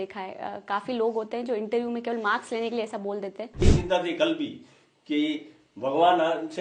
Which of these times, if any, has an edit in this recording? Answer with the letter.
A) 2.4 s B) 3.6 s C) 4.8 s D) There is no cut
B